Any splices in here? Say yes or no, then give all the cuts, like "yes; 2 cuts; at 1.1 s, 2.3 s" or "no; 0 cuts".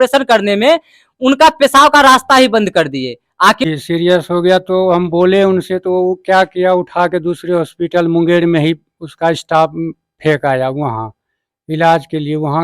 yes; 1 cut; at 3.7 s